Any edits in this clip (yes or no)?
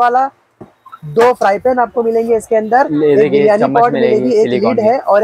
no